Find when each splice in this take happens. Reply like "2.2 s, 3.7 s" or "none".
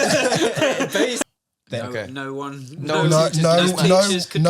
1.2 s